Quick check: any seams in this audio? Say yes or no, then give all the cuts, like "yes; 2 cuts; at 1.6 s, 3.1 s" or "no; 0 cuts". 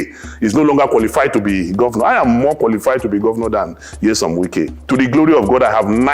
yes; 1 cut; at 4.8 s